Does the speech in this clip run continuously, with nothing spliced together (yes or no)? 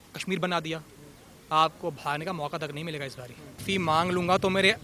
no